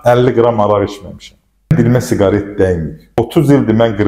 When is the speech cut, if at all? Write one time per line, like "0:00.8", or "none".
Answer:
0:01.7
0:03.2